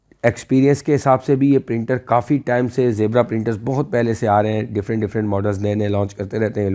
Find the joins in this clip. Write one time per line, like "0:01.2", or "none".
none